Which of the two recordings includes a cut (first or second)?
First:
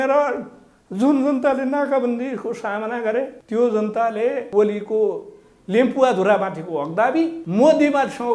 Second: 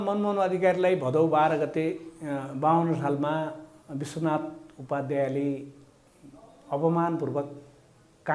first